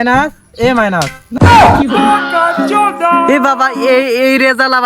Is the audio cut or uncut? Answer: uncut